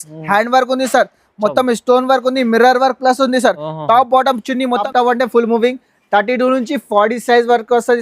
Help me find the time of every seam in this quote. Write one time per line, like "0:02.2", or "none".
0:04.9